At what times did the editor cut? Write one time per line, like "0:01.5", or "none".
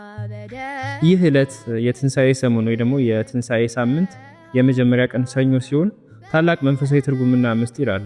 0:00.9

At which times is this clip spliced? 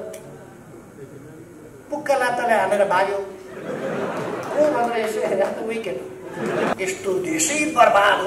0:06.7

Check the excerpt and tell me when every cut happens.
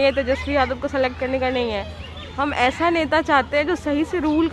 none

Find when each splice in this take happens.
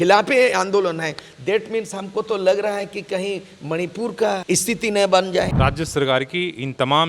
0:04.4
0:05.5

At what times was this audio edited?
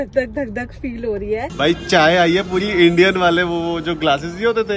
0:01.5

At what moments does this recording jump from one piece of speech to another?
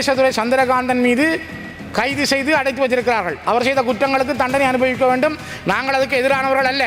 none

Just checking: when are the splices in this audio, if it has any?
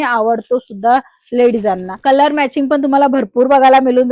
0:02.0

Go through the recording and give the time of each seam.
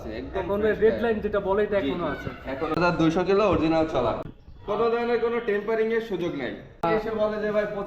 0:02.8
0:04.4
0:06.8

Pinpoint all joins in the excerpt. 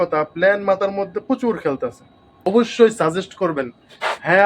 0:02.5

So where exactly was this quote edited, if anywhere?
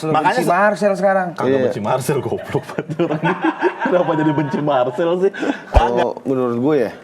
0:05.9

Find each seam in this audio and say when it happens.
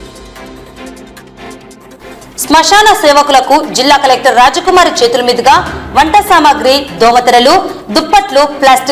0:02.0

